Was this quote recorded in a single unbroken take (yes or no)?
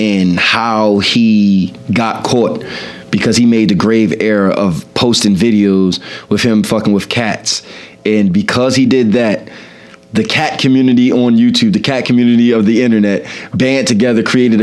yes